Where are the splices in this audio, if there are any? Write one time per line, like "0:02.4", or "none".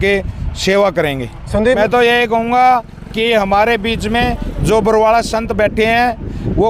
0:01.8